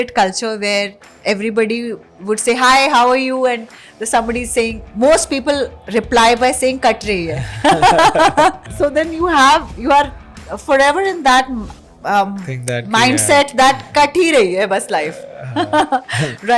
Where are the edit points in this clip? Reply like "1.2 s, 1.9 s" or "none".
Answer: 8.7 s